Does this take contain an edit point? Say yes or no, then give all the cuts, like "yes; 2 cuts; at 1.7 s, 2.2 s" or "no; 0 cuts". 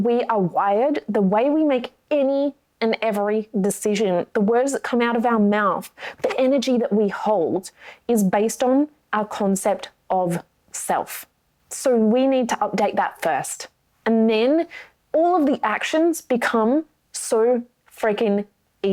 no; 0 cuts